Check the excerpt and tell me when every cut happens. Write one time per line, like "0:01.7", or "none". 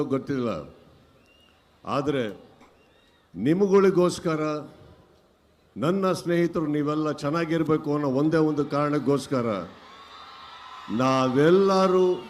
none